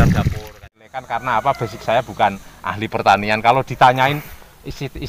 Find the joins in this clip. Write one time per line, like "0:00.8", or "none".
0:01.1